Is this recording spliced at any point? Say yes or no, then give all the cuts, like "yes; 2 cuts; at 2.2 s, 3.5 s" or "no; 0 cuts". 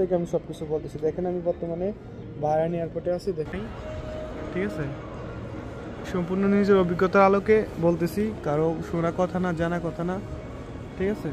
yes; 1 cut; at 3.5 s